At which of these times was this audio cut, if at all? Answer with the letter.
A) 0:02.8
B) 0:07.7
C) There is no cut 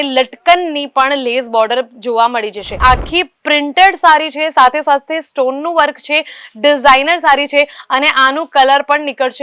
A